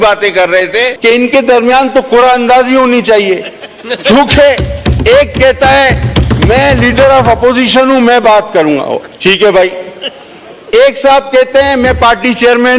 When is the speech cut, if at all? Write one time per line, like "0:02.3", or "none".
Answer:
0:00.9